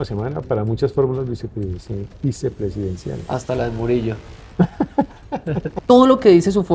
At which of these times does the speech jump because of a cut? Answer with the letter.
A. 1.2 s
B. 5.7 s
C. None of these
B